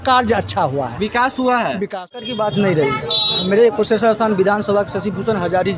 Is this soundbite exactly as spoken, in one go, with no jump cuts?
no; 1 cut; at 2.2 s

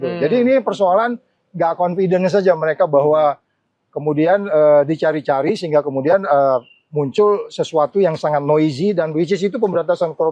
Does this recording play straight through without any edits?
yes; 0 cuts

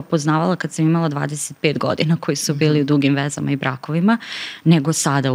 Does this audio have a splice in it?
no; 0 cuts

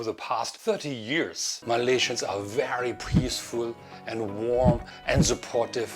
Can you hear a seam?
yes; 1 cut; at 1.5 s

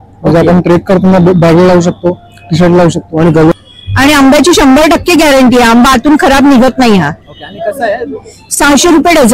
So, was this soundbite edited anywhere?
yes; 1 cut; at 3.5 s

